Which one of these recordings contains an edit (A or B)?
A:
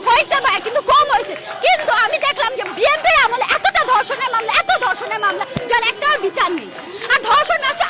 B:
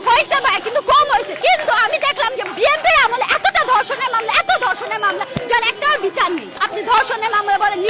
B